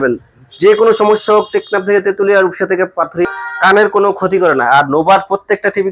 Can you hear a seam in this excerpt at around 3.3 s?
yes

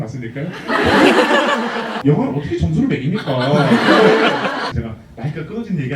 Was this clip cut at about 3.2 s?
no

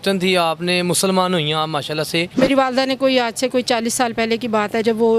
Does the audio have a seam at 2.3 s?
yes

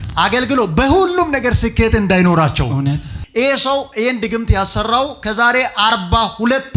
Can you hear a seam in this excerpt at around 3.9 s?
no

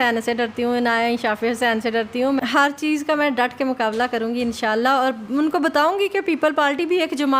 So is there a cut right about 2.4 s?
yes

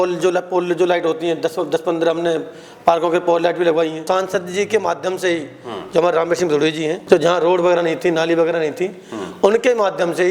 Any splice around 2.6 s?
no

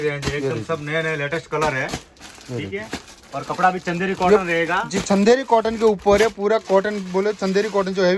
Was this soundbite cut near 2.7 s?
no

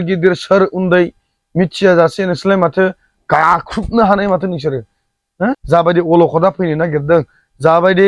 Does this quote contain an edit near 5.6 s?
yes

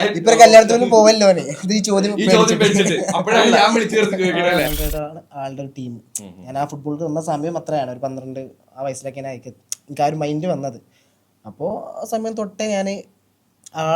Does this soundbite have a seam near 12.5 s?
no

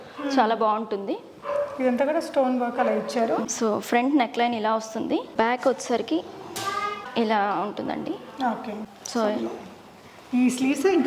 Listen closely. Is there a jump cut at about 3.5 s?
yes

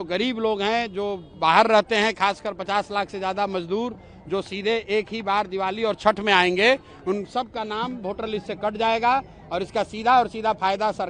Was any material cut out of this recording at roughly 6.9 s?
no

